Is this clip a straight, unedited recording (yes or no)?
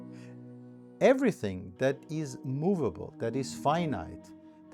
no